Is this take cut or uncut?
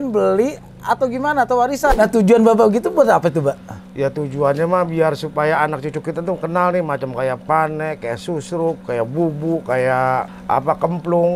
cut